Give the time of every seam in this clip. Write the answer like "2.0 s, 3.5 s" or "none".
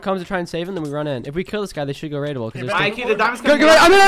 none